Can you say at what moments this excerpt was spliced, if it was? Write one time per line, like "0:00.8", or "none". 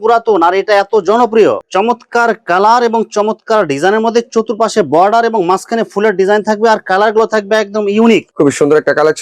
0:01.6
0:08.3